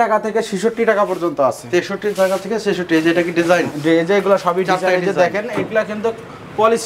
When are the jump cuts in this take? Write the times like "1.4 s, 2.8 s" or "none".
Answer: none

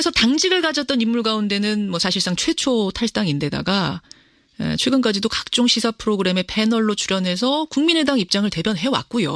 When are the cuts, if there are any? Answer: none

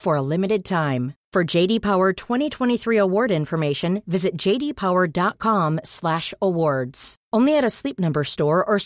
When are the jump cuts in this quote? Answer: none

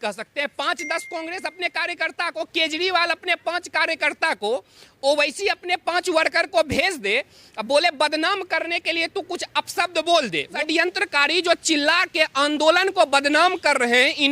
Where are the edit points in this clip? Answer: 10.5 s

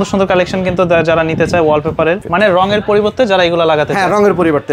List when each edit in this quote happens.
2.2 s

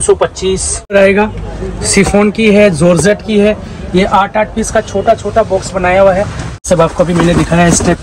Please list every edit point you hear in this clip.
0.9 s, 6.6 s

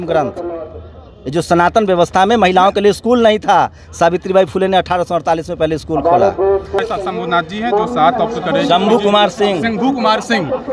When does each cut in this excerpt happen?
6.8 s

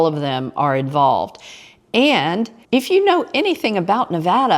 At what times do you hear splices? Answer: 2.6 s

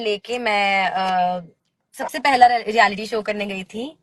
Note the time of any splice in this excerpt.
none

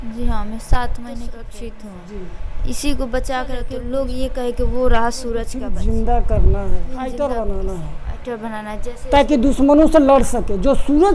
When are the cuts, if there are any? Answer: 1.4 s, 3.8 s, 5.6 s, 7.0 s

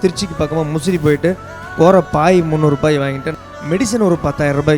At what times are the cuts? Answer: 3.3 s

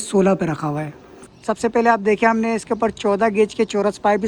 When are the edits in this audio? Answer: 1.2 s

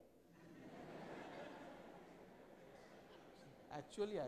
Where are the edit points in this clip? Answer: none

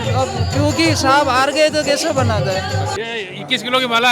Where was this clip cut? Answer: 2.9 s

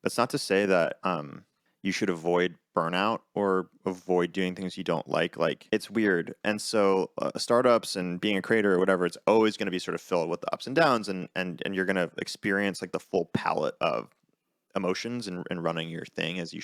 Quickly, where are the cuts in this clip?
5.6 s, 6.3 s

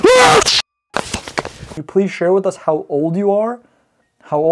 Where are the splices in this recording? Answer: 1.7 s

